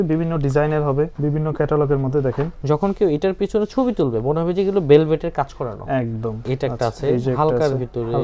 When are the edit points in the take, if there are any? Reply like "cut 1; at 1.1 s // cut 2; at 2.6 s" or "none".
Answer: cut 1; at 1.1 s // cut 2; at 2.5 s // cut 3; at 6.4 s